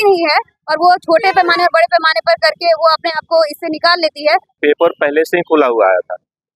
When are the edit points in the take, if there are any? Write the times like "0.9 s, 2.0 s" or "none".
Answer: 4.5 s